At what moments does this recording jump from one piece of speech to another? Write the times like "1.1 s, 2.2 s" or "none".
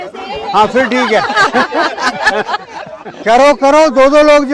none